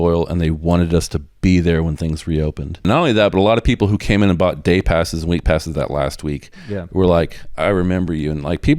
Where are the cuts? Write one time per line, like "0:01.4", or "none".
0:02.8